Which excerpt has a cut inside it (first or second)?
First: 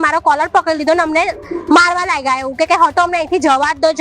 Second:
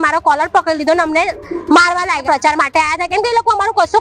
second